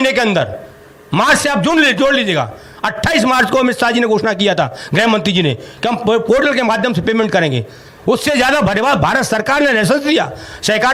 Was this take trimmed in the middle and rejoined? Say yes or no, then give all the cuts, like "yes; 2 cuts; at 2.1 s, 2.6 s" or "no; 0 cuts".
no; 0 cuts